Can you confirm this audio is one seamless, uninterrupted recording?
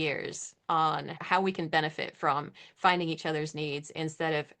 no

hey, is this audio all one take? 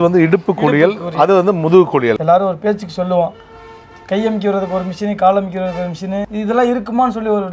no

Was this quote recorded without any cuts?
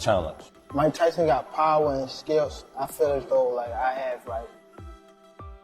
no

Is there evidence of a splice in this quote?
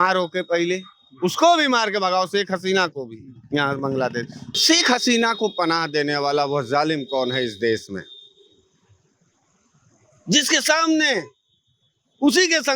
yes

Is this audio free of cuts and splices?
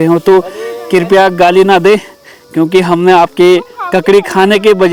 yes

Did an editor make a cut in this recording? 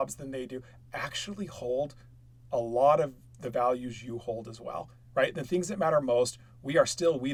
no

